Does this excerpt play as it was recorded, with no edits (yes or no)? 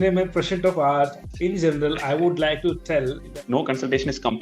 no